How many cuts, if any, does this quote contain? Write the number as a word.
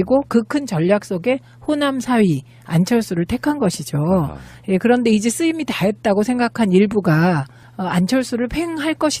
one